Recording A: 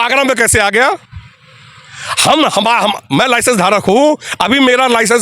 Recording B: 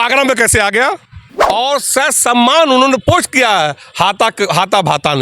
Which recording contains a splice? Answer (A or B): B